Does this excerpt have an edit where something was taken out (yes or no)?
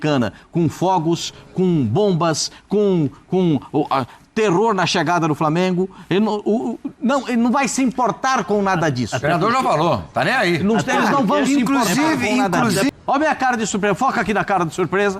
yes